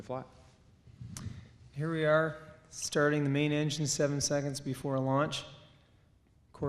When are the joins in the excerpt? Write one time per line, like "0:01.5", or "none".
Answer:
0:05.5

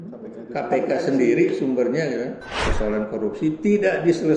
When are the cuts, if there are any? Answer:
0:02.6

